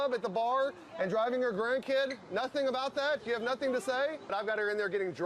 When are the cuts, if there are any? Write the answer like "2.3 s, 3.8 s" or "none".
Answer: 4.3 s